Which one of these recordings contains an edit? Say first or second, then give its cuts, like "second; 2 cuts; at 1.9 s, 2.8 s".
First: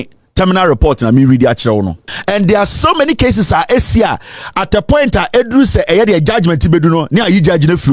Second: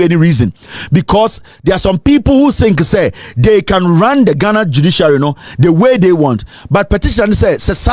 first; 1 cut; at 2.1 s